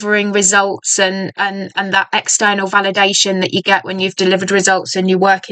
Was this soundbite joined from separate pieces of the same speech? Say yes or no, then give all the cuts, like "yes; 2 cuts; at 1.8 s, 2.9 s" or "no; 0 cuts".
no; 0 cuts